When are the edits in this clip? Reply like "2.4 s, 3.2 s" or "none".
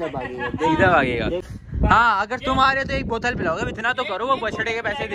1.5 s